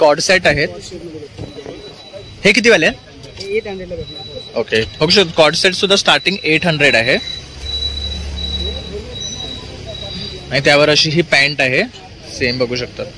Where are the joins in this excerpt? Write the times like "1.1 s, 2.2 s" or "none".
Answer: none

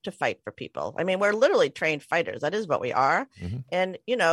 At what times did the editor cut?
none

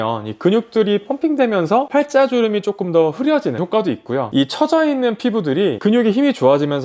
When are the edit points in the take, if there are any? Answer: 4.3 s

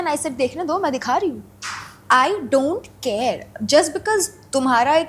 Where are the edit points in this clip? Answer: none

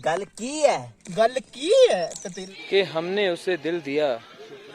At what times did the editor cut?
2.4 s

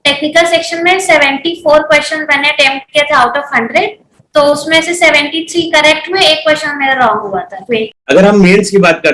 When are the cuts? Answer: 8.0 s

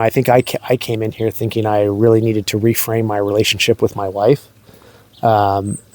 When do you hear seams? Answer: none

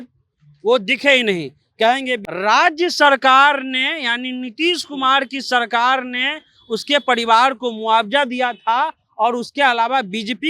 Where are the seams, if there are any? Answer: 2.2 s

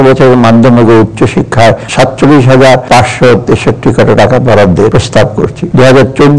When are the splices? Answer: 1.9 s

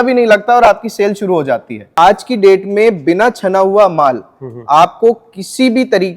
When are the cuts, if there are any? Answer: 1.9 s

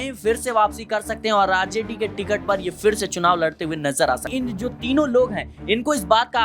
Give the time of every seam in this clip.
4.3 s

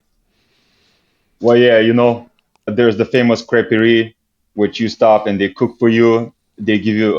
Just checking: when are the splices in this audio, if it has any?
2.7 s

